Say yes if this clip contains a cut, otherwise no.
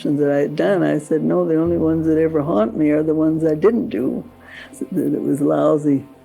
yes